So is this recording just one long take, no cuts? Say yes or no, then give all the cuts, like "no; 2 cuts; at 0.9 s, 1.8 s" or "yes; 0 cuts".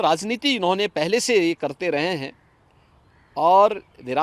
yes; 0 cuts